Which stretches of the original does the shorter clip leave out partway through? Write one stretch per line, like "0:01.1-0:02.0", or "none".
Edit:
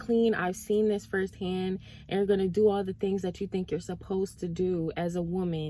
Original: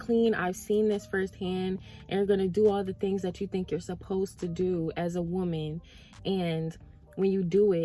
none